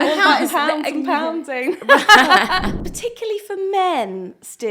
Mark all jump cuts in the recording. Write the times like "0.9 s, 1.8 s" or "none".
2.7 s

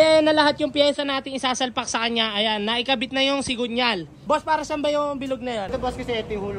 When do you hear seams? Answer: 4.2 s, 5.7 s

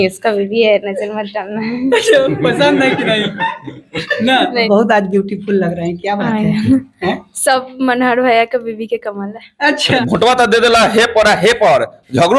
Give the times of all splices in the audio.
4.6 s, 10.0 s

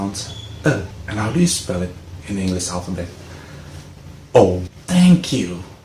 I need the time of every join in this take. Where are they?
1.0 s, 4.7 s

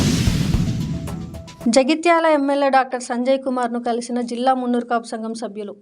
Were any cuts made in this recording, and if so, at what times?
1.5 s

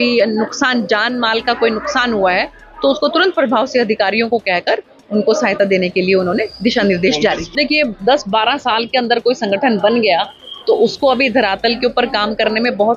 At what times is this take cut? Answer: 7.5 s

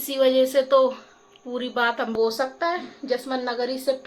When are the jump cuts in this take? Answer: 2.1 s

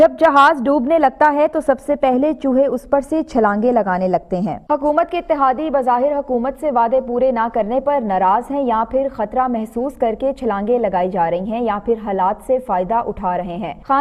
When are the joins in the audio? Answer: none

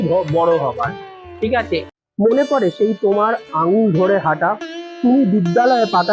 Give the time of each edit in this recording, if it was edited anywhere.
1.8 s

